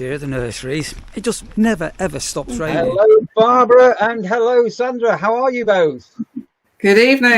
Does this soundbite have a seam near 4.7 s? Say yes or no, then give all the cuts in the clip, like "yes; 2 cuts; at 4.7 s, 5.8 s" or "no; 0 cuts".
no; 1 cut; at 2.7 s